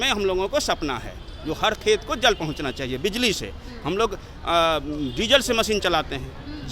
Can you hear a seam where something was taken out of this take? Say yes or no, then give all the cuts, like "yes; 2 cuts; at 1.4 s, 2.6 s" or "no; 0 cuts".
no; 0 cuts